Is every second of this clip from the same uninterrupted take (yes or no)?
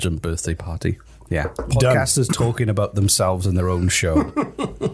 no